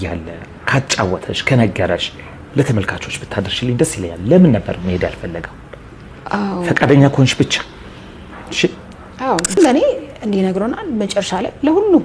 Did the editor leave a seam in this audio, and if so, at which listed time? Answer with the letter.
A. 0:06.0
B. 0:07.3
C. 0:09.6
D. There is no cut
C